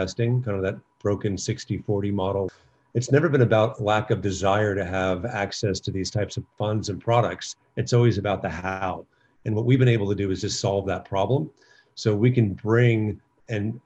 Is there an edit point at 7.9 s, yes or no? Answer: no